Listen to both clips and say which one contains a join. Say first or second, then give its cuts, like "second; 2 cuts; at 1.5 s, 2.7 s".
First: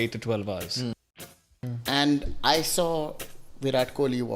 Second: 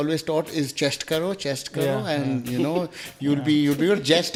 first; 1 cut; at 1.3 s